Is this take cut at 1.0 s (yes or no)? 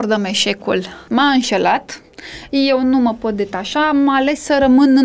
yes